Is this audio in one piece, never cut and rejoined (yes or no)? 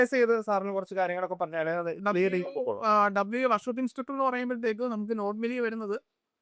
yes